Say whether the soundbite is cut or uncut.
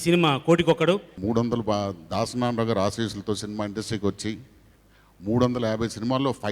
cut